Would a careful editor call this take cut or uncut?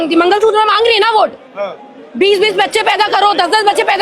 uncut